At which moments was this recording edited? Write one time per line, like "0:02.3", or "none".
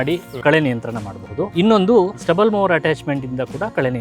0:01.5
0:02.1